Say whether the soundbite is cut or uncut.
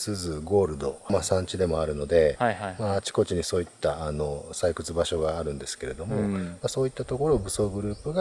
uncut